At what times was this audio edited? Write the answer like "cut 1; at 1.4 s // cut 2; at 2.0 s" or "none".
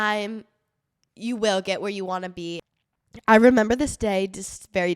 cut 1; at 2.6 s

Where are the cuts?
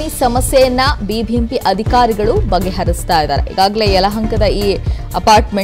cut 1; at 3.7 s

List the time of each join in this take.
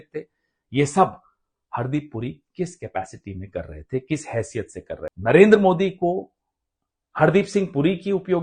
cut 1; at 5.1 s

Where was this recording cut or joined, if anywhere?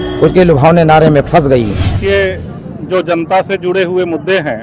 cut 1; at 1.9 s

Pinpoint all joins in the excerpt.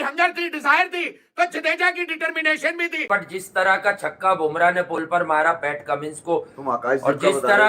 cut 1; at 3.1 s

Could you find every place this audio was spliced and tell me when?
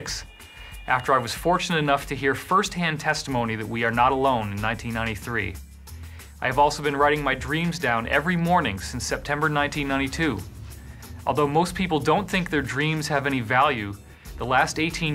cut 1; at 6.8 s

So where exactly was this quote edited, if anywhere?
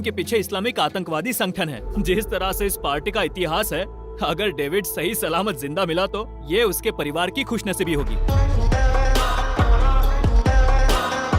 cut 1; at 1.8 s // cut 2; at 8.2 s

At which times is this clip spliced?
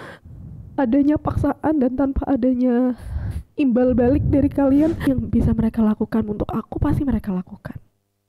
cut 1; at 5.1 s

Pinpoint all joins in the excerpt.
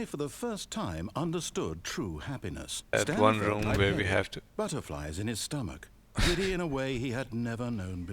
cut 1; at 2.9 s

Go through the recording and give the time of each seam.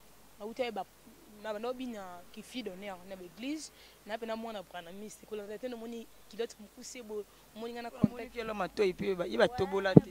none

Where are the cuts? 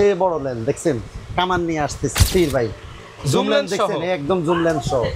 cut 1; at 2.2 s

